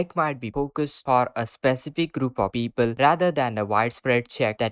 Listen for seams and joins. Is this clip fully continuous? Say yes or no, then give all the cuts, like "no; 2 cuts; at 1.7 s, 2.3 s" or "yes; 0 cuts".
yes; 0 cuts